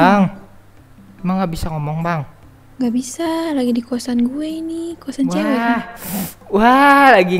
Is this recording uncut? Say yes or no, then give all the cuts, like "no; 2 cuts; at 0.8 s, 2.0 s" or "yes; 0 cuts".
yes; 0 cuts